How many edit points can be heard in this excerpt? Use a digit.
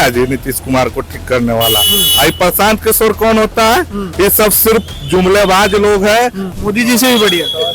1